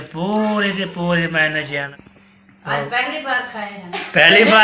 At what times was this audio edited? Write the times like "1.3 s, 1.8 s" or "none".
2.0 s